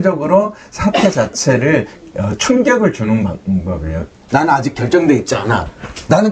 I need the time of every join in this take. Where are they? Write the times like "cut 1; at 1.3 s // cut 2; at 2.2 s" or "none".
cut 1; at 4.2 s